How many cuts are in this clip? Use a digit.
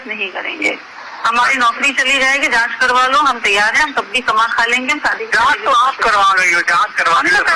0